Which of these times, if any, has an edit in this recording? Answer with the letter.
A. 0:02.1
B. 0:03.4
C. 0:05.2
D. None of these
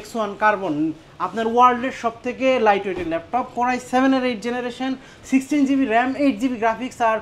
D